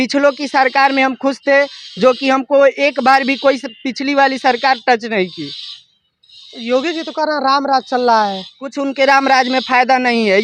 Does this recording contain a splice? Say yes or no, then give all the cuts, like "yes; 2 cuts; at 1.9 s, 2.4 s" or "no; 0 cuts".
no; 0 cuts